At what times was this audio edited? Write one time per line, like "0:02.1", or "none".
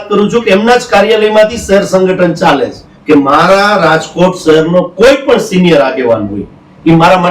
0:02.9